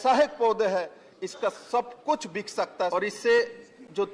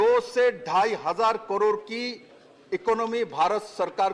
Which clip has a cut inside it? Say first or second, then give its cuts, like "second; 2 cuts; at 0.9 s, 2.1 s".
first; 1 cut; at 2.9 s